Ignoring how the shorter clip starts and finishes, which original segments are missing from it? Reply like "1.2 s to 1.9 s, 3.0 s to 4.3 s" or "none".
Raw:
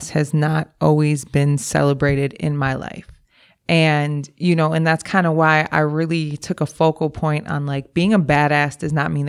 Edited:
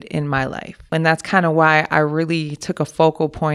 3.2 s to 4.7 s